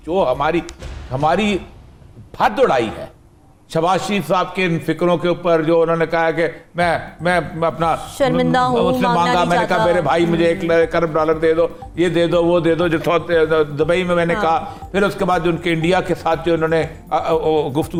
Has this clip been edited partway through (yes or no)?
no